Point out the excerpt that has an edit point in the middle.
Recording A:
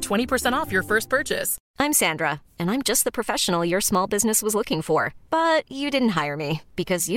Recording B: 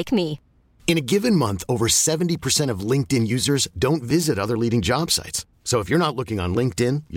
A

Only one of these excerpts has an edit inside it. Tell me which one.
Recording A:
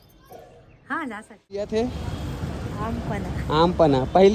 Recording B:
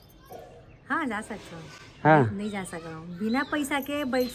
A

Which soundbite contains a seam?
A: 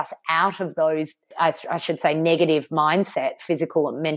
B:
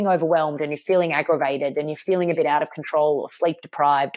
A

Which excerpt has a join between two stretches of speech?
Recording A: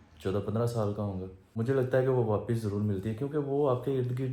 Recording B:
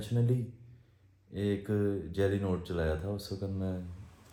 A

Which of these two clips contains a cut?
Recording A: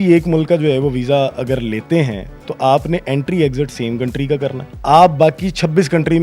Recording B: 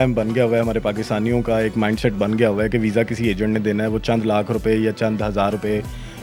A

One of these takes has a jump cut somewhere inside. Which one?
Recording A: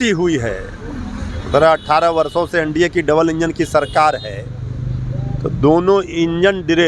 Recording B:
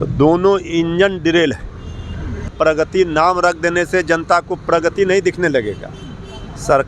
B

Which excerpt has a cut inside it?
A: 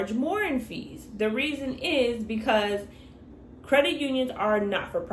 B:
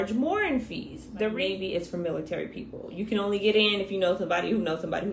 B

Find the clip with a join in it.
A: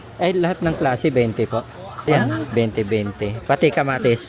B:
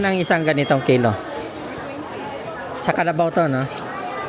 A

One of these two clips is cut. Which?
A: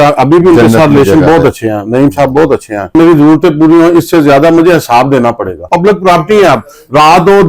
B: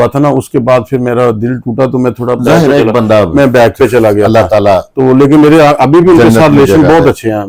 A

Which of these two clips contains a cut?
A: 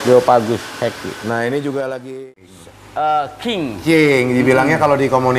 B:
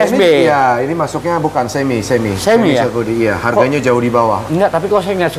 A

